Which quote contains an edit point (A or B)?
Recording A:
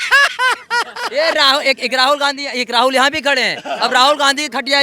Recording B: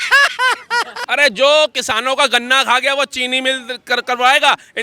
B